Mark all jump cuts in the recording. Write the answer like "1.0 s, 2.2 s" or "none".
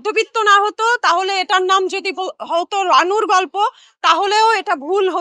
none